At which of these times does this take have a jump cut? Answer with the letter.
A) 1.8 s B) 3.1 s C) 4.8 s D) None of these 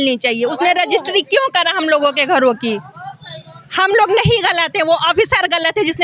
D